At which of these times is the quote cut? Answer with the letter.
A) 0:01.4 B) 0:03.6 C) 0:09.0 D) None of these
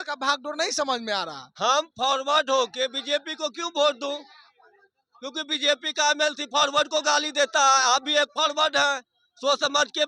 A